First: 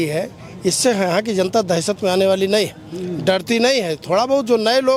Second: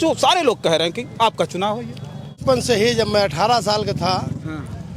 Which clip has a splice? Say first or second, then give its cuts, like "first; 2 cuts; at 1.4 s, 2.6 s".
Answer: second; 1 cut; at 2.4 s